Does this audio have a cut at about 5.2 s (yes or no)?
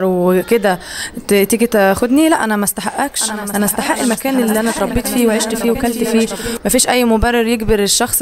no